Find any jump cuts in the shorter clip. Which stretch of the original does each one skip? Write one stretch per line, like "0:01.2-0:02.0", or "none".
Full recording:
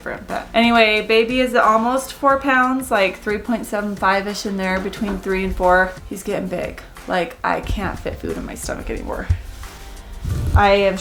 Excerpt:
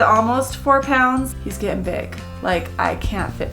0:02.9-0:05.9